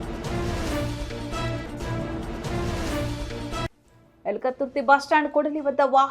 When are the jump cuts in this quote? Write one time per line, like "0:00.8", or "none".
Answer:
0:03.8